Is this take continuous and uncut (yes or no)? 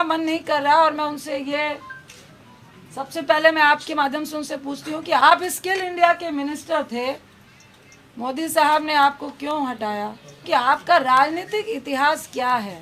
no